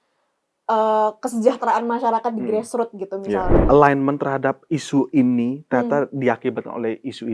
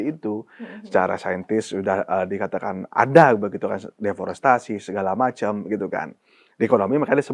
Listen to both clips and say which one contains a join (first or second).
first